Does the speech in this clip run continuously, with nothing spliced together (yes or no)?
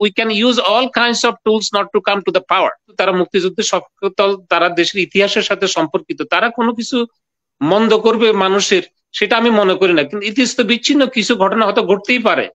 no